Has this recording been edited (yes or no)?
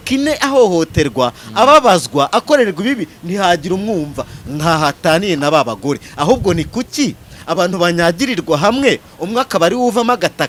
no